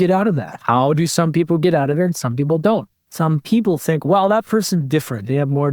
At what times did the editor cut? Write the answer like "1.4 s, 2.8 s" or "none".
3.0 s